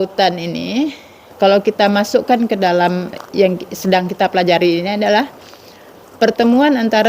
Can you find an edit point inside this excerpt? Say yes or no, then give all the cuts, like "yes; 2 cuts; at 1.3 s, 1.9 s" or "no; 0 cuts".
yes; 2 cuts; at 1.3 s, 3.2 s